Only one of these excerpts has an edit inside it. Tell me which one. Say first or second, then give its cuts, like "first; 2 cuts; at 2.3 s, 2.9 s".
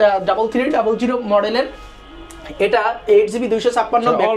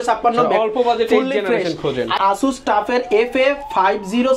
second; 1 cut; at 2.1 s